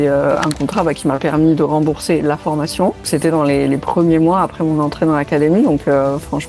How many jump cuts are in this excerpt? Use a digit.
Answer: 1